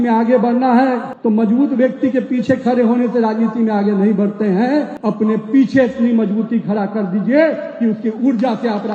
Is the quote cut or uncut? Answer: cut